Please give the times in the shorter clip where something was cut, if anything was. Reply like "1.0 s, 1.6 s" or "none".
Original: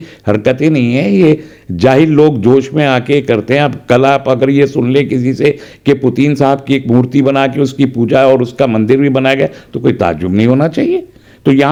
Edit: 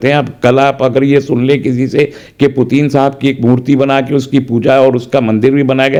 none